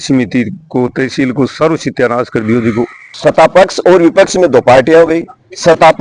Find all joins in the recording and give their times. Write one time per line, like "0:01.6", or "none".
0:03.0